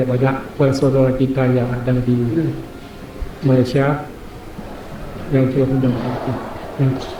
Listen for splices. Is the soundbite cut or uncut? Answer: uncut